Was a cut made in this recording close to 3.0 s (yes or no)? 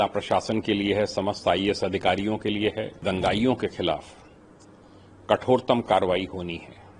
yes